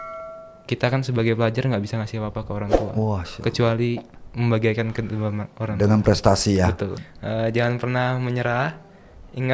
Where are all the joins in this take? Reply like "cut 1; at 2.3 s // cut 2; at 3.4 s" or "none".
cut 1; at 7.1 s